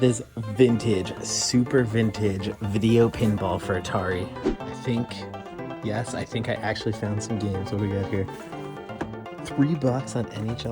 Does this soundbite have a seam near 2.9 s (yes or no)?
no